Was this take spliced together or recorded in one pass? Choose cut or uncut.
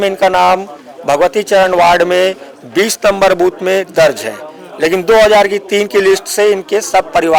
uncut